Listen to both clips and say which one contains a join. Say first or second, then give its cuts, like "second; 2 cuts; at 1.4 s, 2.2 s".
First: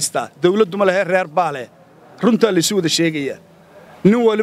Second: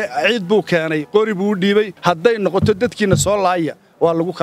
second; 1 cut; at 1.9 s